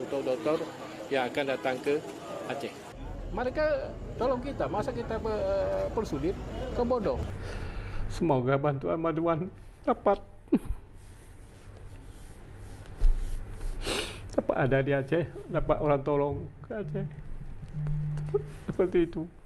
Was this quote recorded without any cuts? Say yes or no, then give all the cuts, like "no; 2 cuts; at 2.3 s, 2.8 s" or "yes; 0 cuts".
no; 2 cuts; at 2.9 s, 7.3 s